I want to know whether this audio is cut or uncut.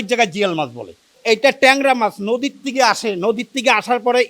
cut